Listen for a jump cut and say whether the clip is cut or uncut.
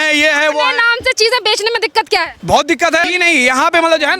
cut